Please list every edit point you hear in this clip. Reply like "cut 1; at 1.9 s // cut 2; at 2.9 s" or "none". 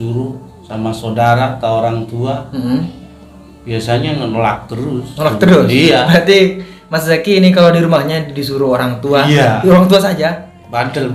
none